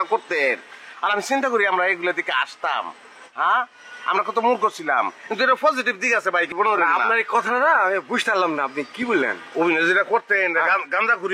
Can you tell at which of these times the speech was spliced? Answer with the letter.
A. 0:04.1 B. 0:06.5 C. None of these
B